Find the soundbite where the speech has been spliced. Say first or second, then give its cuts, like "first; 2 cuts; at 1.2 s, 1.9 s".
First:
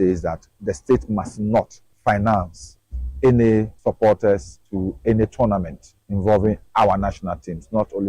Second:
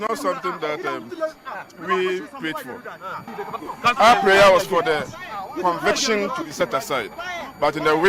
first; 2 cuts; at 3.7 s, 6.6 s